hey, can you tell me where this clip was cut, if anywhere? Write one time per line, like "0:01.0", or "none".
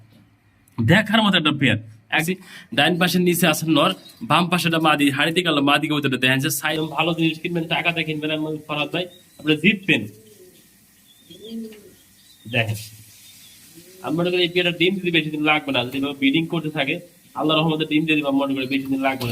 0:02.2
0:06.6